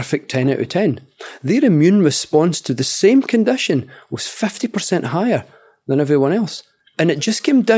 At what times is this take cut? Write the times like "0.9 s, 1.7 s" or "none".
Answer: 6.9 s